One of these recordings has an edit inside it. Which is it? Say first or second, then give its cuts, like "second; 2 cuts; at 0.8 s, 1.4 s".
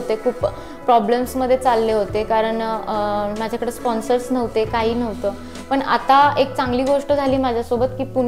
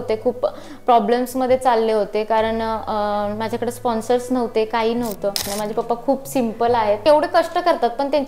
second; 1 cut; at 5.5 s